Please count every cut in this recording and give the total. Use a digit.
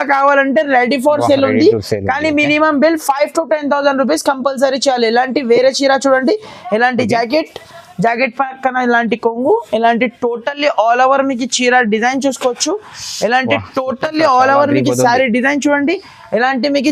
0